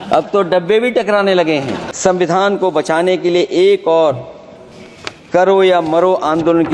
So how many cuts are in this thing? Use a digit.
1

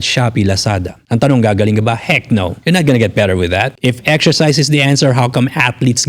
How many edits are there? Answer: 3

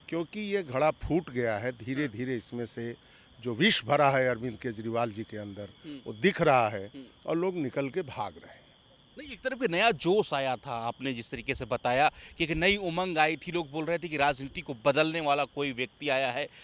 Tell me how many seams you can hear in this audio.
0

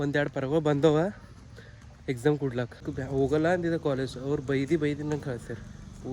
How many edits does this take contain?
1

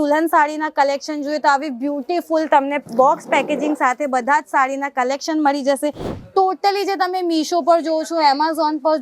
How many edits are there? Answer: 1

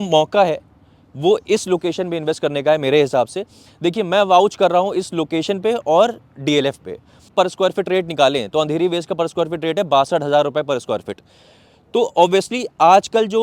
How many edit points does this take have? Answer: 1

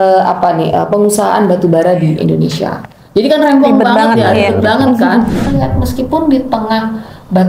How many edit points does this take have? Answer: 1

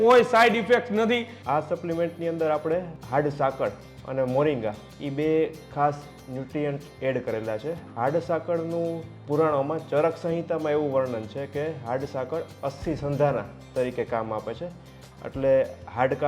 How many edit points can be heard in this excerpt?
2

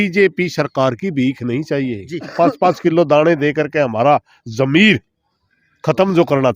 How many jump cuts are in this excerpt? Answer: 1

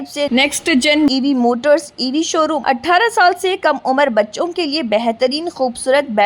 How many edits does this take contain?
1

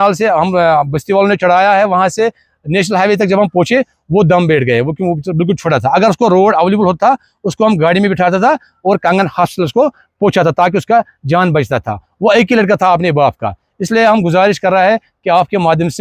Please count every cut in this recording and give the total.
0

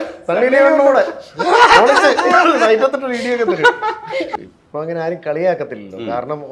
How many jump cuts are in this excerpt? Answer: 1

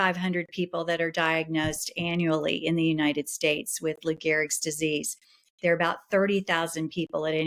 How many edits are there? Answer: 0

